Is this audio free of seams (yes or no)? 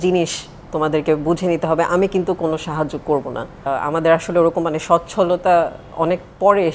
no